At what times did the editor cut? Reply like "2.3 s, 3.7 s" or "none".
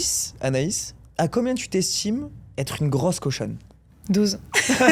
none